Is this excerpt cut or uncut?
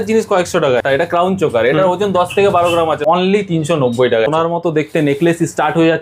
cut